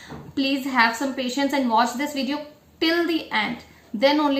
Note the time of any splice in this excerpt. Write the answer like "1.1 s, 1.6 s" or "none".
none